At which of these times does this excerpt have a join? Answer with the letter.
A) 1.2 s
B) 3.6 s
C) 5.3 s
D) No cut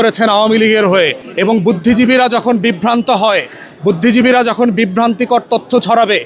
A